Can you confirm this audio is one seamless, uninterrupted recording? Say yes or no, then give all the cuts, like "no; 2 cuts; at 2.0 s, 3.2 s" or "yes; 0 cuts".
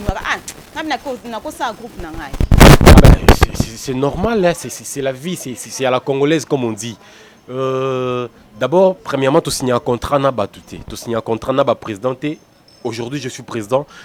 yes; 0 cuts